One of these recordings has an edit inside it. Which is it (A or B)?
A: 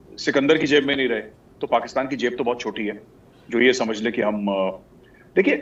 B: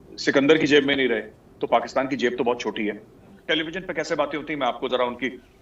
B